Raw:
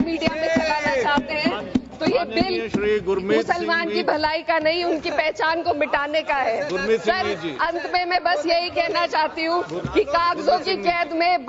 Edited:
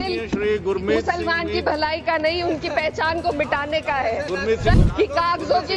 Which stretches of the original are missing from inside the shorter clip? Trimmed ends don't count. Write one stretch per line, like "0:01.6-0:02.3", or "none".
0:07.2-0:09.7